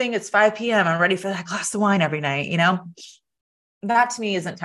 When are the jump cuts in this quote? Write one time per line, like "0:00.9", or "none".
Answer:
none

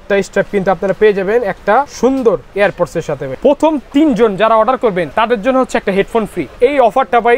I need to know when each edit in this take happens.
0:01.9
0:03.3
0:05.1
0:06.4

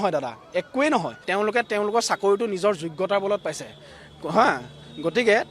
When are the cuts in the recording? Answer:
0:01.2

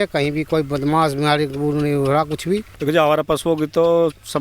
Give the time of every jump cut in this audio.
0:02.7

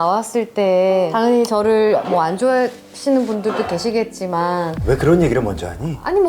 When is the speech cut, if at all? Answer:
0:01.1

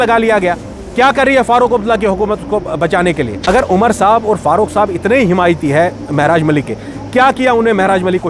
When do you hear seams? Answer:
0:03.4

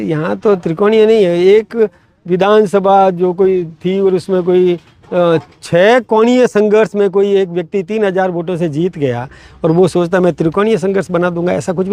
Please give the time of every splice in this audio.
none

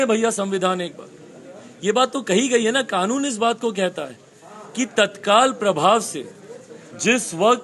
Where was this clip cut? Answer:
none

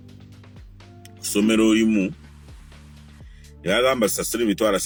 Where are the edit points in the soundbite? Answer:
none

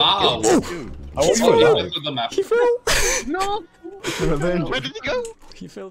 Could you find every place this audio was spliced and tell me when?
none

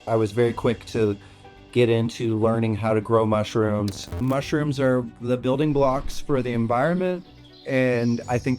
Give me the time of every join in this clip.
0:04.1

